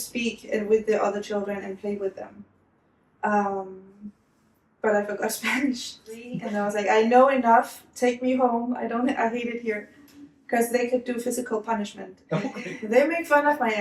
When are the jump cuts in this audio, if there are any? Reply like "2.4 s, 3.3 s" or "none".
6.4 s, 12.5 s